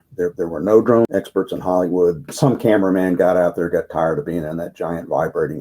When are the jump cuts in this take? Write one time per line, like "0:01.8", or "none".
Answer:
0:01.1
0:02.3